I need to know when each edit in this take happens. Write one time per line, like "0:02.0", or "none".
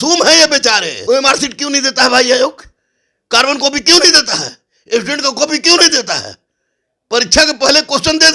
0:00.9